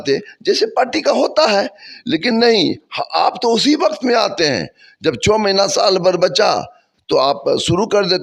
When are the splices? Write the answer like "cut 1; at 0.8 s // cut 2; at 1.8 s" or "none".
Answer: none